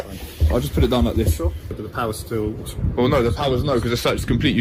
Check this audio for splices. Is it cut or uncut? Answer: cut